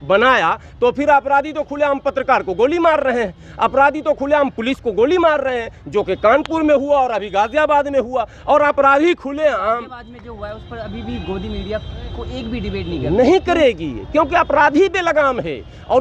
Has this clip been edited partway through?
no; 0 cuts

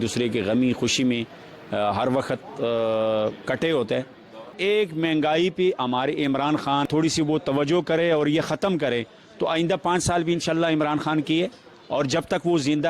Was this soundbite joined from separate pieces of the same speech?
yes; 2 cuts; at 4.5 s, 6.9 s

